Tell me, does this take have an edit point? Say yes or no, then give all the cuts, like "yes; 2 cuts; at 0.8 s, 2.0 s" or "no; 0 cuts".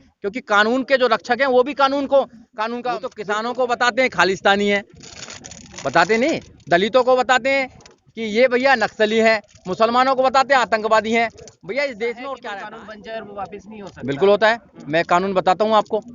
yes; 2 cuts; at 3.1 s, 12.5 s